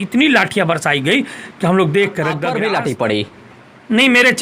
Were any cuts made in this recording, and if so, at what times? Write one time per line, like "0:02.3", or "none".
0:02.5